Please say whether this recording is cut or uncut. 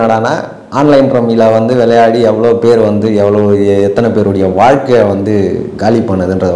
uncut